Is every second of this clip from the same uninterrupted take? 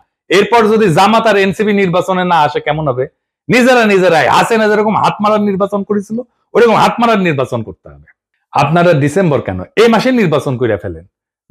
yes; 0 cuts

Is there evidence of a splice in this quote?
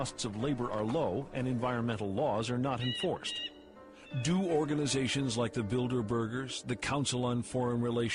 yes; 1 cut; at 5.1 s

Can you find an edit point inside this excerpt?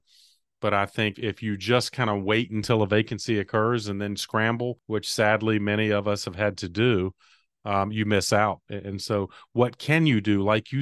yes; 2 cuts; at 1.1 s, 4.8 s

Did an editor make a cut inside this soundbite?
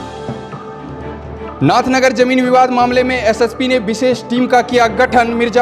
yes; 1 cut; at 1.5 s

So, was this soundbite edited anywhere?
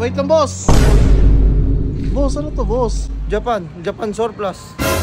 no; 0 cuts

